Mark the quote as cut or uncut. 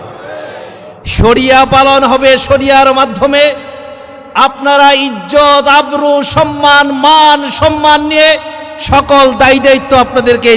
uncut